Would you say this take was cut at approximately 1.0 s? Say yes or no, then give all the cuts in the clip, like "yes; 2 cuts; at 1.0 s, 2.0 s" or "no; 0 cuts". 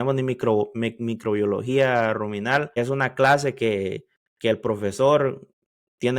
no; 1 cut; at 2.7 s